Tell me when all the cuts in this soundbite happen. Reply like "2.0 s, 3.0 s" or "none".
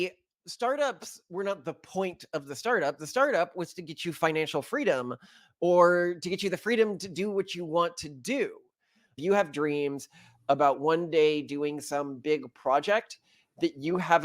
9.1 s